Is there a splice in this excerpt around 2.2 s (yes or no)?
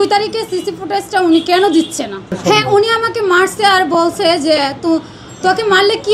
yes